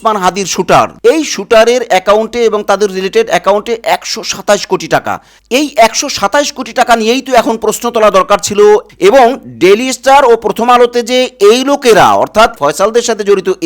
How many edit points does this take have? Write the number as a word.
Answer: three